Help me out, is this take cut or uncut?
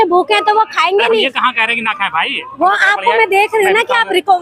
uncut